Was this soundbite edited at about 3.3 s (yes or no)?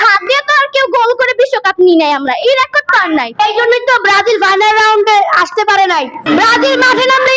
yes